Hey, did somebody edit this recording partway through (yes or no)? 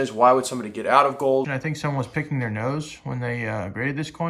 yes